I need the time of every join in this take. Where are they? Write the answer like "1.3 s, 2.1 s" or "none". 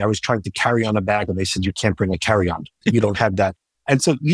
2.8 s